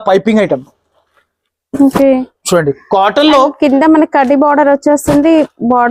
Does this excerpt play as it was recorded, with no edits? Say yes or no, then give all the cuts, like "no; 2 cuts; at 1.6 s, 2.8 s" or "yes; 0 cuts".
yes; 0 cuts